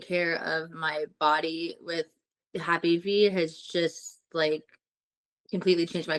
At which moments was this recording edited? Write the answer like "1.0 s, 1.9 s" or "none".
none